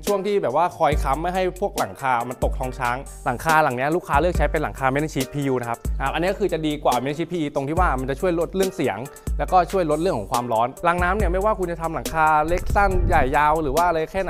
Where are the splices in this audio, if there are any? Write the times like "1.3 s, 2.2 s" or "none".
3.1 s, 5.9 s, 10.8 s

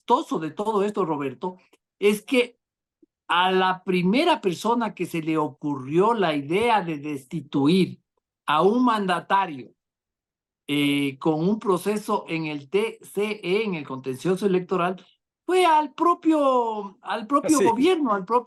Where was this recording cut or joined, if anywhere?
none

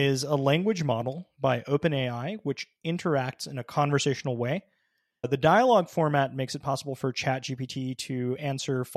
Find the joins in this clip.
5.3 s

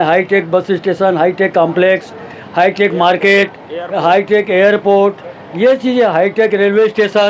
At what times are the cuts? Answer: none

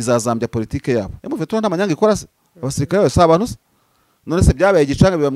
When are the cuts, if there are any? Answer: 1.2 s

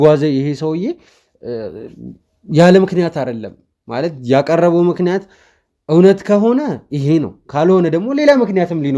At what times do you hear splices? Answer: none

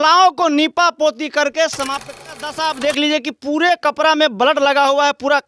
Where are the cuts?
2.2 s

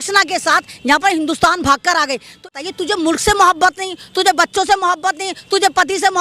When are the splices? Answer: 2.5 s

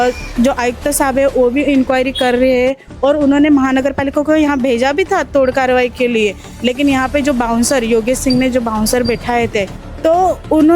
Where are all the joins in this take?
9.8 s

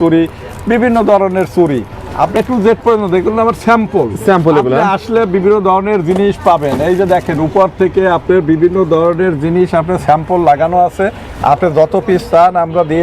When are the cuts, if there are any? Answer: 2.4 s

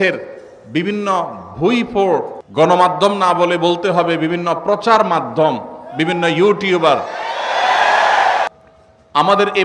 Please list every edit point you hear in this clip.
2.4 s, 8.5 s

